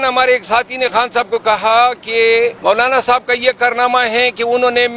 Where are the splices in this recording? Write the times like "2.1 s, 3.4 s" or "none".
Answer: 2.6 s